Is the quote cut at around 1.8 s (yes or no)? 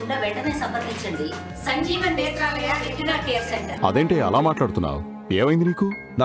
no